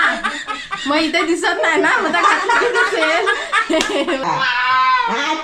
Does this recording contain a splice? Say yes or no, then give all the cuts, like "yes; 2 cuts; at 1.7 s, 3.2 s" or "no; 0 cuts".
yes; 1 cut; at 4.2 s